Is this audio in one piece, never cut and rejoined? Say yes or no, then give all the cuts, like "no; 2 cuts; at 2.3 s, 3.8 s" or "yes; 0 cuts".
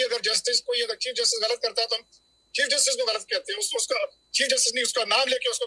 yes; 0 cuts